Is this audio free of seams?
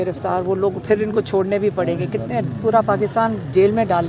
yes; 0 cuts

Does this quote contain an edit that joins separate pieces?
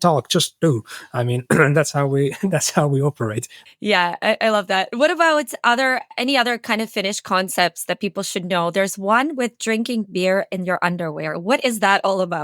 no; 0 cuts

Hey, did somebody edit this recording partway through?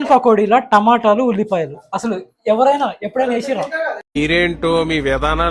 no; 0 cuts

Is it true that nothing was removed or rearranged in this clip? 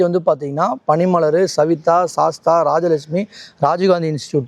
yes; 0 cuts

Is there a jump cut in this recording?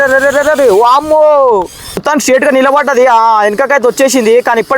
no; 0 cuts

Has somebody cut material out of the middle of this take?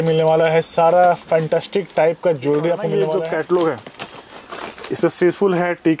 yes; 1 cut; at 3.0 s

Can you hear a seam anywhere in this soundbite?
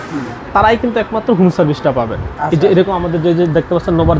no; 0 cuts

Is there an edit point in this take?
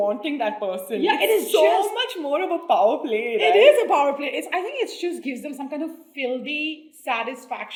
no; 0 cuts

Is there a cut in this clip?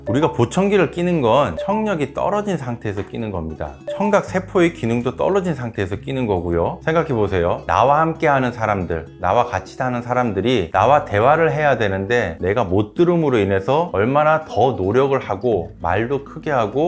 yes; 1 cut; at 6.8 s

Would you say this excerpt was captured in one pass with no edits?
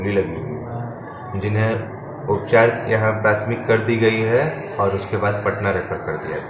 yes; 0 cuts

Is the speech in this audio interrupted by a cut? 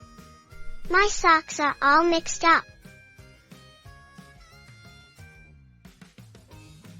no; 0 cuts

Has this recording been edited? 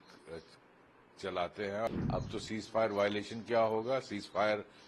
yes; 1 cut; at 1.9 s

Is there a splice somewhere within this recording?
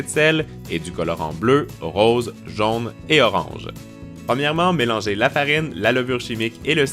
yes; 1 cut; at 4.9 s

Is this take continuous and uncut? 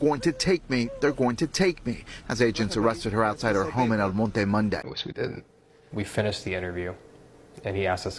no; 1 cut; at 5.0 s

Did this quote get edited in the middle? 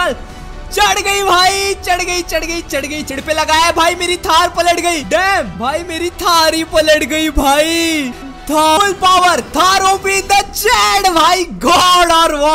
yes; 2 cuts; at 3.1 s, 8.8 s

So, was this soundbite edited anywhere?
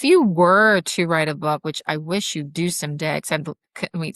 no; 0 cuts

